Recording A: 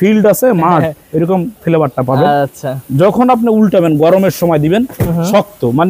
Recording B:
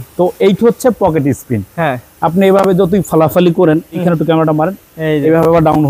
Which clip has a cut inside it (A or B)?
B